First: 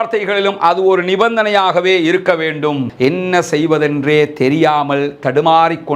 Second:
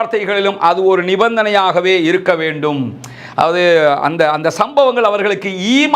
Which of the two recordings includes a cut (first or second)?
first